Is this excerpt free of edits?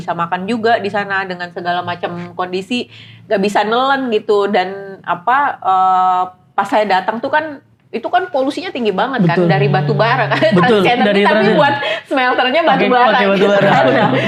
yes; 0 cuts

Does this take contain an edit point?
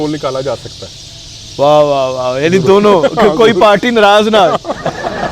no; 0 cuts

